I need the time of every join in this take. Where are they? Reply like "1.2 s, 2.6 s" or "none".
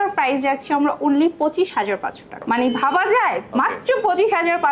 2.3 s

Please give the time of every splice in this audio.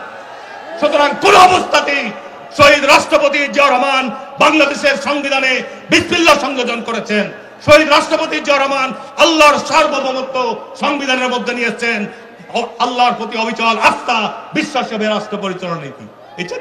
none

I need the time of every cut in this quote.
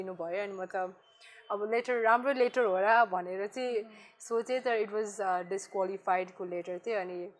none

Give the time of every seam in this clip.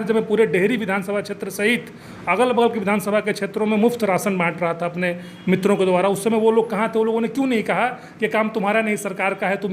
none

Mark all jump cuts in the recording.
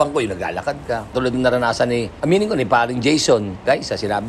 1.1 s

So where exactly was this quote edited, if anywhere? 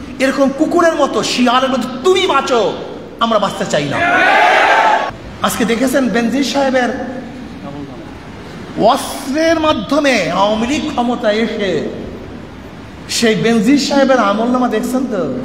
5.2 s

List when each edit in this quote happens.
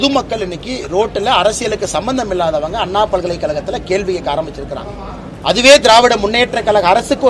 none

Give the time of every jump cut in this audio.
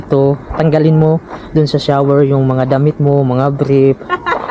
none

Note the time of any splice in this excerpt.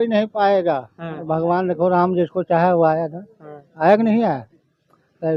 none

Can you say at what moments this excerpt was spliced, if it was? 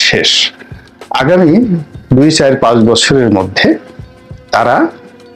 none

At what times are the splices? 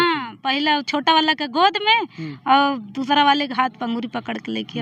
none

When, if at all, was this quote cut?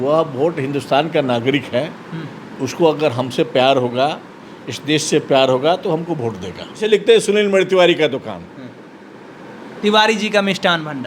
6.8 s

